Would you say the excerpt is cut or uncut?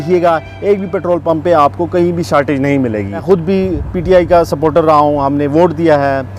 cut